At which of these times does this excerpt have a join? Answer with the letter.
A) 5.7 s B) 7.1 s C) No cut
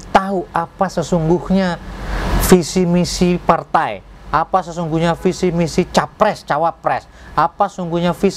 C